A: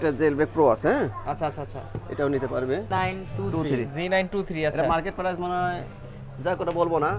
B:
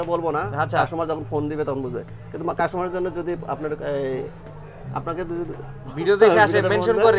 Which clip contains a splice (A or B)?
A